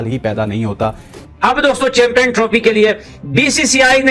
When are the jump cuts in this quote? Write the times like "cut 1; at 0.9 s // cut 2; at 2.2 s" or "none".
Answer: cut 1; at 1.1 s